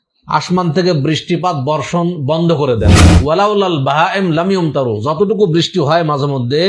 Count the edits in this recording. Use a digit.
1